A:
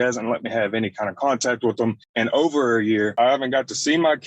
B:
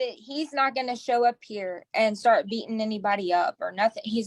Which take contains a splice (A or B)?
A